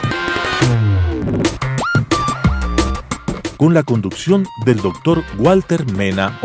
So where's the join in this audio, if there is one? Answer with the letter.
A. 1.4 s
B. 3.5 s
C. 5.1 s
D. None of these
A